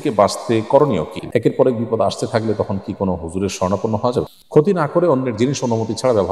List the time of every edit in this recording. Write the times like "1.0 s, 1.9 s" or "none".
1.2 s, 4.3 s